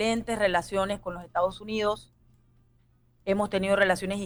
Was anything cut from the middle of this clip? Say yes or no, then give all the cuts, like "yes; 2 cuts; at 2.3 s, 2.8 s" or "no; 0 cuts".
no; 0 cuts